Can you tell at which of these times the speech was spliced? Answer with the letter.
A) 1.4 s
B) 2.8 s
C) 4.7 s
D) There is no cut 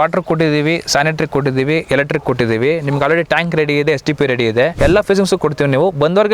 C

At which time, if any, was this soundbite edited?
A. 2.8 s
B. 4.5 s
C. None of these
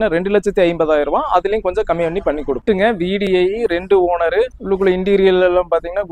B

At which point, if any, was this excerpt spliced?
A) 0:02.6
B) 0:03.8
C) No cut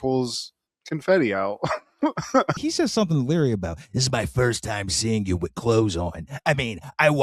A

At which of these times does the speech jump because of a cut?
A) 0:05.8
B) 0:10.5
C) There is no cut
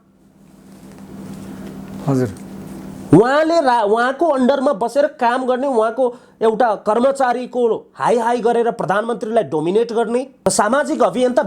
B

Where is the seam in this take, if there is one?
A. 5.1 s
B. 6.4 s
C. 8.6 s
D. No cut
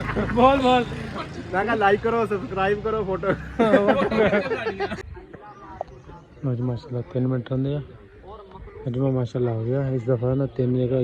A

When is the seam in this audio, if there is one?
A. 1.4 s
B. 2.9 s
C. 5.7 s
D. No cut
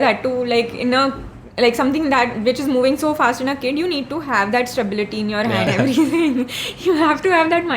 C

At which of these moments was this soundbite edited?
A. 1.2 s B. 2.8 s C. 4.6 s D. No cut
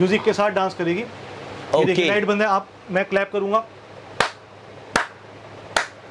D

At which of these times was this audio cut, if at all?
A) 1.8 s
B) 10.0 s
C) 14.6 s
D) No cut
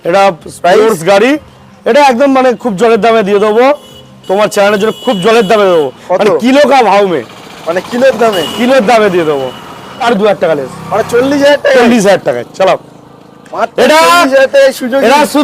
B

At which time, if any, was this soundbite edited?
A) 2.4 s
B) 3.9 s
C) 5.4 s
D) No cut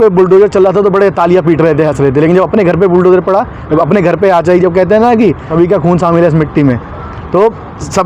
C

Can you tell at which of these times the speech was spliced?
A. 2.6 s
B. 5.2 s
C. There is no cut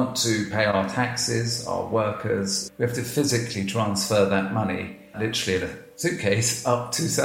A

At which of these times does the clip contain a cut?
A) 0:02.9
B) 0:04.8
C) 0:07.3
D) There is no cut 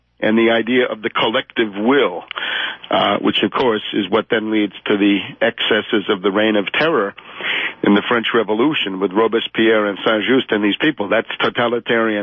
B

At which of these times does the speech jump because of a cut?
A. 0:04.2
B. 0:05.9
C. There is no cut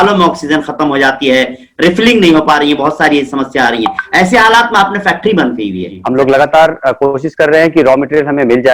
B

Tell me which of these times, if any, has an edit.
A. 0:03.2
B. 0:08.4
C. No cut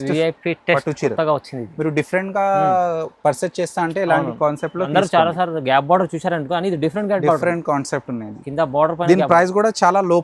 C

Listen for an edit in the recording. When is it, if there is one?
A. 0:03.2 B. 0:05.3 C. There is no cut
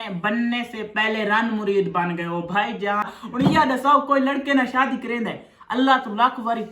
A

